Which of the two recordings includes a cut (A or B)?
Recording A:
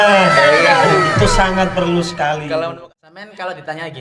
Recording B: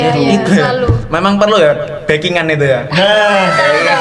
A